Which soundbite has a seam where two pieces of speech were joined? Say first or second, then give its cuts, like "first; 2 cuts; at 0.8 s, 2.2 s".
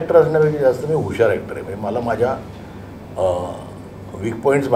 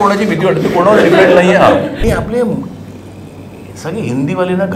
second; 1 cut; at 2.0 s